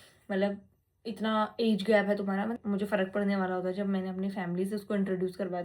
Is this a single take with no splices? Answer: no; 1 cut; at 2.6 s

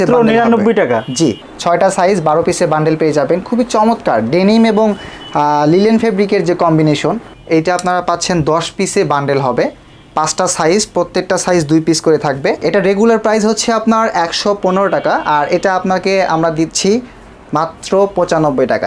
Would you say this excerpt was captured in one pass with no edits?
no; 3 cuts; at 1.4 s, 7.3 s, 12.6 s

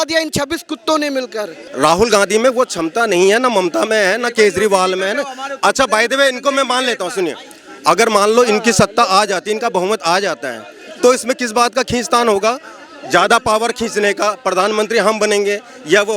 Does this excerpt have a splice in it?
yes; 1 cut; at 1.6 s

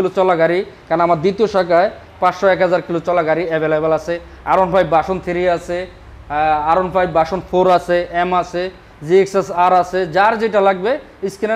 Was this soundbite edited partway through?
no; 0 cuts

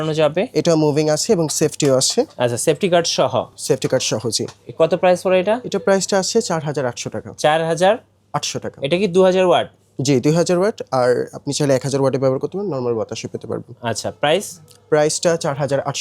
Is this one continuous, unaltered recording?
yes; 0 cuts

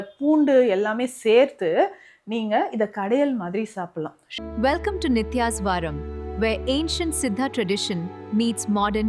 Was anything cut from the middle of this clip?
yes; 1 cut; at 4.2 s

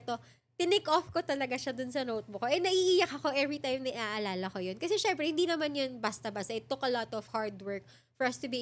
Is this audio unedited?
yes; 0 cuts

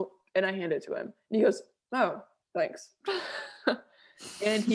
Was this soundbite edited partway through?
no; 0 cuts

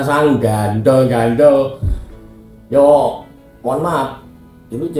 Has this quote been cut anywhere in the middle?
no; 0 cuts

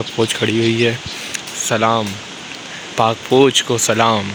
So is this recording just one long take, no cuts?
yes; 0 cuts

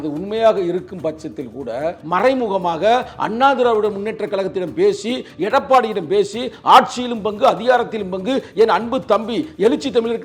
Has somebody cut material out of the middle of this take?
yes; 1 cut; at 2.0 s

